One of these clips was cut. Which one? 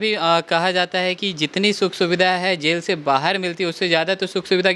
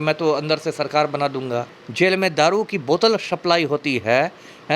second; 1 cut; at 1.8 s

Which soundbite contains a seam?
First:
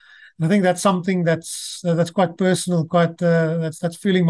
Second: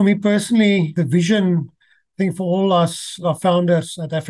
second; 2 cuts; at 0.9 s, 3.2 s

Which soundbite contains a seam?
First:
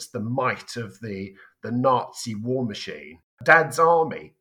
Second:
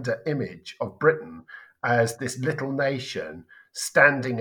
first; 1 cut; at 3.4 s

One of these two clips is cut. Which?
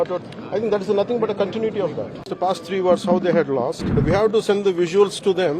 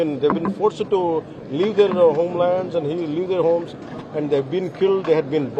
first; 2 cuts; at 2.2 s, 3.9 s

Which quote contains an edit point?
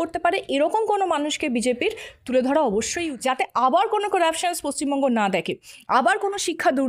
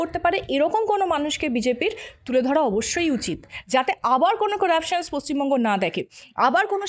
first; 1 cut; at 3.0 s

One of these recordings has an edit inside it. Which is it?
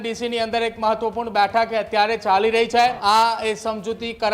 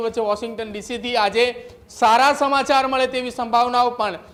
first; 1 cut; at 3.0 s

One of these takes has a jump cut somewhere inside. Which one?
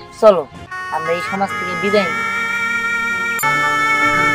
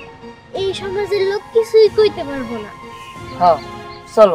first; 1 cut; at 3.4 s

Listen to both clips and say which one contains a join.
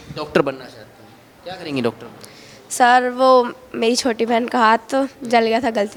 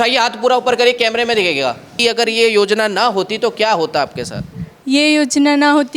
second; 1 cut; at 2.0 s

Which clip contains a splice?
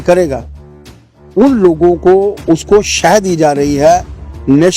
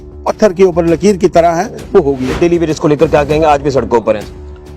second; 1 cut; at 2.3 s

